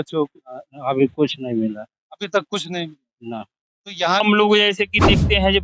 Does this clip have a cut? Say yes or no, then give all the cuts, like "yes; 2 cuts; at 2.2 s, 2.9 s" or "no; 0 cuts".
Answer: yes; 1 cut; at 4.2 s